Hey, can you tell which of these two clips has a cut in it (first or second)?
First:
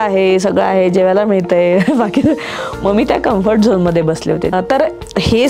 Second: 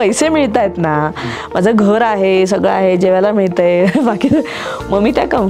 first